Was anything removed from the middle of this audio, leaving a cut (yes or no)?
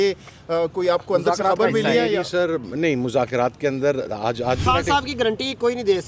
yes